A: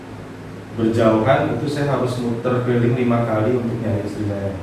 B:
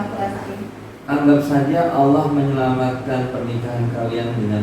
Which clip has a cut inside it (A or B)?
B